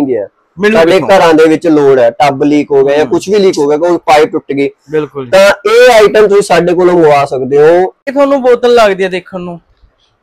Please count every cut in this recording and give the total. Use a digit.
1